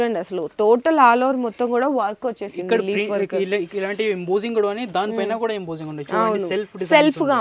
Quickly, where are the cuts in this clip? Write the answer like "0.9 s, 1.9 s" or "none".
none

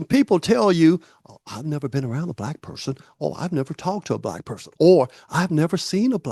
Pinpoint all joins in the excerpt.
none

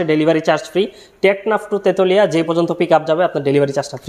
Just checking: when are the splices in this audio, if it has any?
none

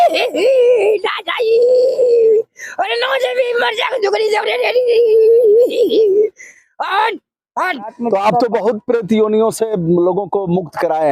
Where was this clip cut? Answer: 7.9 s

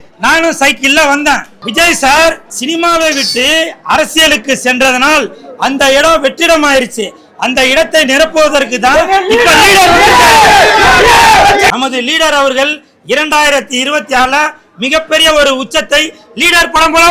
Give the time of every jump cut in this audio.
1.6 s, 2.5 s, 11.7 s

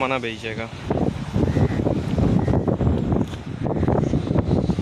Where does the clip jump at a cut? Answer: none

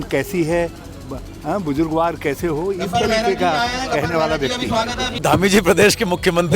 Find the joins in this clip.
5.2 s

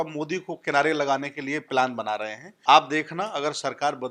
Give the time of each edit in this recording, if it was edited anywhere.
2.5 s

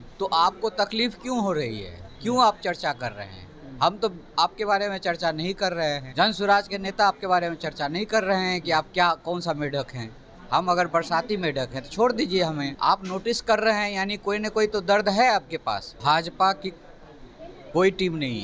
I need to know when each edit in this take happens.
6.1 s, 12.7 s, 15.9 s

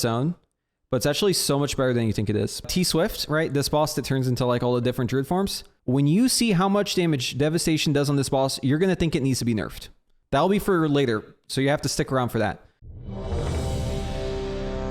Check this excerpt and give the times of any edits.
2.7 s, 5.7 s, 10.3 s, 12.7 s

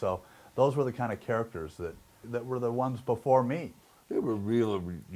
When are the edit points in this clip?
none

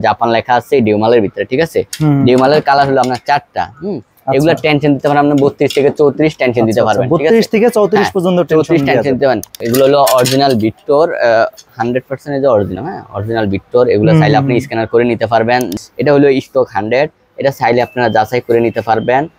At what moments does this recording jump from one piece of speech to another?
9.6 s, 15.7 s

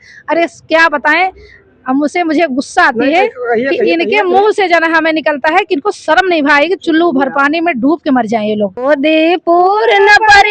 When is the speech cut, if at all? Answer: 8.8 s

